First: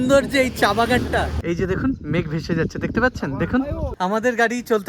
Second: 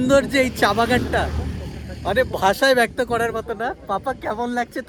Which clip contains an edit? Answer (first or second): first